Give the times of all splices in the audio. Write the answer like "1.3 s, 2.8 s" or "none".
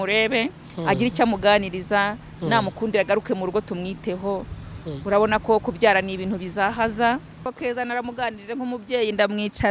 7.3 s